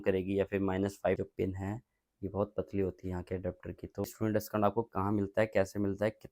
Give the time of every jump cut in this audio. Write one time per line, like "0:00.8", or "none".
0:01.2
0:04.1